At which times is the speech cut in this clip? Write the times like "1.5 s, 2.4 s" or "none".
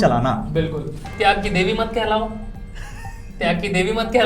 1.1 s

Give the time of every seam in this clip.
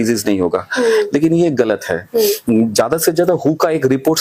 none

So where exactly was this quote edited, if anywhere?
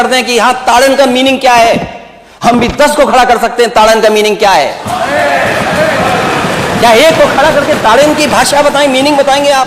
none

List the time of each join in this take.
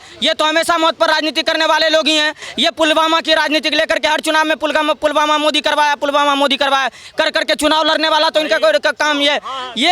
none

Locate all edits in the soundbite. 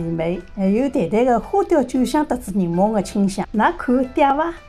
none

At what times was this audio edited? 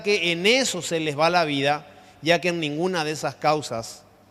3.0 s

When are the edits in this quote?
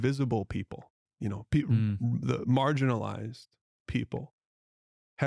none

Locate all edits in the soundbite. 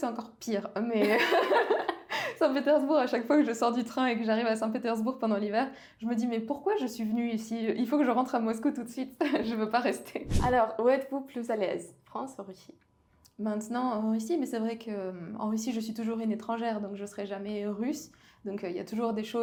none

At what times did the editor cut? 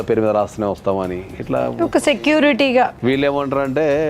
3.0 s

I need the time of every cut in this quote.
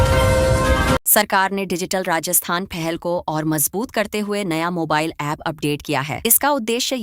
1.1 s

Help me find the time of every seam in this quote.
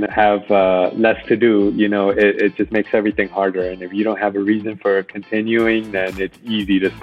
none

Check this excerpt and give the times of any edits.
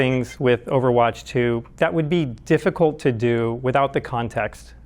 1.7 s

